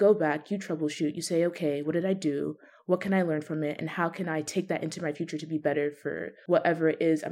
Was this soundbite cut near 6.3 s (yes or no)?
yes